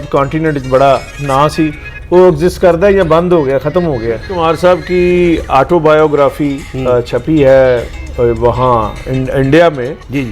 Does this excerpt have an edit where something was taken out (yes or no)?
yes